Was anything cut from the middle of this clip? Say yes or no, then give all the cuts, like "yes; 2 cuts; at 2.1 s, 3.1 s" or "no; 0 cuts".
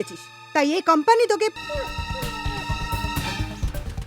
yes; 1 cut; at 1.6 s